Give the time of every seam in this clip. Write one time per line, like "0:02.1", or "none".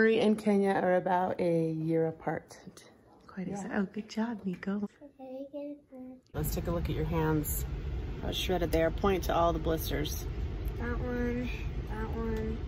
0:04.8
0:06.3